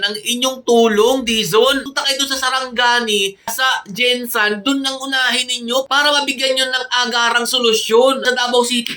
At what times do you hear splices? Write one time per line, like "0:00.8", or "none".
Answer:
0:01.9
0:08.2